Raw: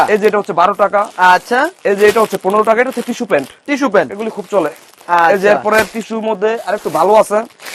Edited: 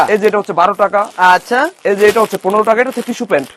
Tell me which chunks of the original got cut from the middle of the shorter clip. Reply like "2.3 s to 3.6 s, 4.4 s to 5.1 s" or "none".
none